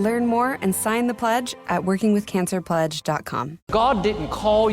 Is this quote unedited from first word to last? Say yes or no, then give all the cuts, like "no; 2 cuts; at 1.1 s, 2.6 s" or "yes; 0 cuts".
no; 2 cuts; at 1.4 s, 3.6 s